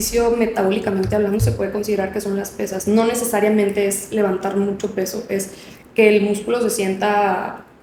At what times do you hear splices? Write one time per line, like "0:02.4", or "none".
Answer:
none

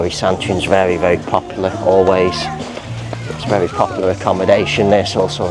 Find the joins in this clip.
none

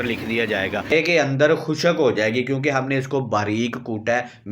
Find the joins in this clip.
0:00.9

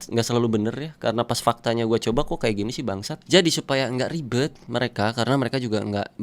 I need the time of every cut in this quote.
0:03.1

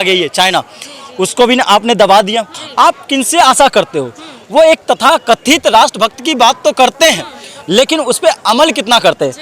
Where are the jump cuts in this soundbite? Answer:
0:02.6

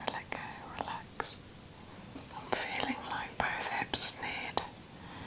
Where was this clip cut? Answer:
0:02.2

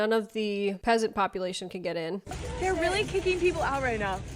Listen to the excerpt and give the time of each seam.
0:02.4

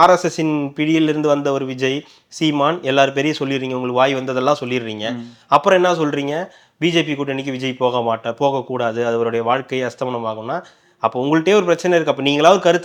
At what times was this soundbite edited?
none

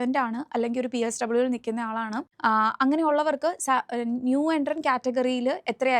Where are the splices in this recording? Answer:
0:02.2

